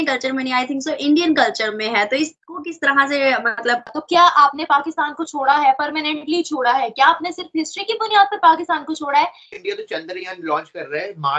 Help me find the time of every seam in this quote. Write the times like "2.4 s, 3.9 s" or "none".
4.0 s, 9.6 s